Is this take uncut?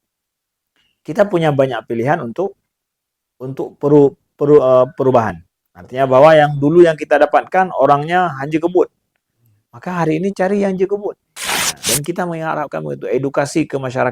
no; 1 cut; at 11.7 s

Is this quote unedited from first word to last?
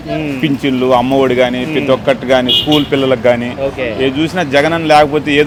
yes; 0 cuts

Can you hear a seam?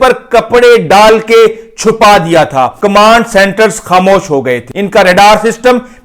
yes; 2 cuts; at 2.7 s, 4.7 s

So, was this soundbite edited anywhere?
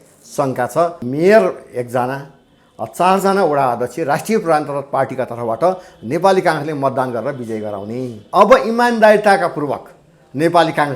yes; 2 cuts; at 1.0 s, 8.2 s

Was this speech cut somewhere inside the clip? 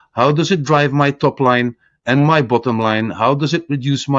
no; 0 cuts

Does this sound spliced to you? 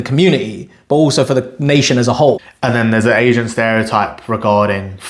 yes; 1 cut; at 2.5 s

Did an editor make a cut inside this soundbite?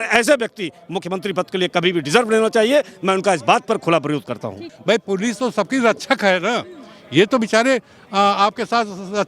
yes; 1 cut; at 4.7 s

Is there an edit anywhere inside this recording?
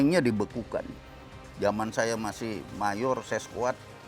yes; 1 cut; at 1.4 s

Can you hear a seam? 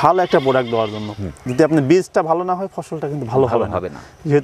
no; 0 cuts

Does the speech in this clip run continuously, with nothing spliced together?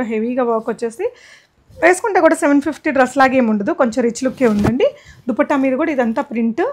yes; 0 cuts

